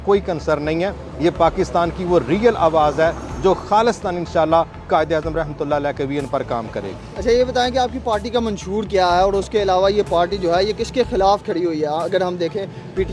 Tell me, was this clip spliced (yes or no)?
no